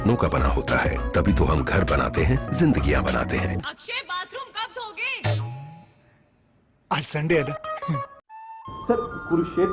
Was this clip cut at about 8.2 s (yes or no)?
yes